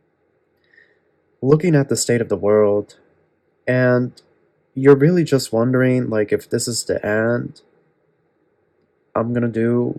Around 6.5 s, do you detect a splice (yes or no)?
no